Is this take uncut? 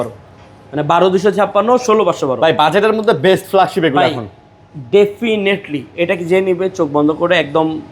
yes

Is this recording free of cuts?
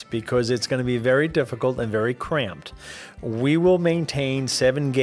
yes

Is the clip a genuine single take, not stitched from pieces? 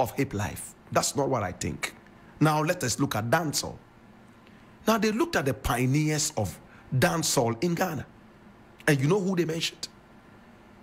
yes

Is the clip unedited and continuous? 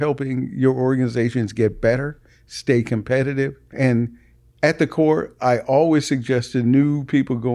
no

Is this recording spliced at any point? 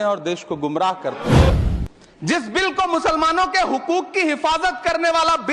yes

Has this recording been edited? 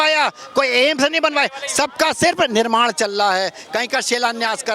no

